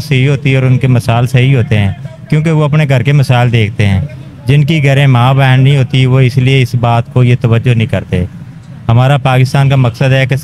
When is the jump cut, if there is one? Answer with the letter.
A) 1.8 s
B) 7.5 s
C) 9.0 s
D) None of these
D